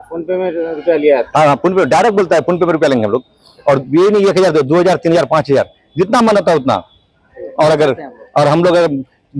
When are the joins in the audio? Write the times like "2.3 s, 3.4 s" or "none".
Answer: none